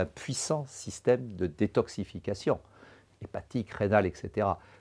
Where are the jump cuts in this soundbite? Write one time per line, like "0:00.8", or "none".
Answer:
none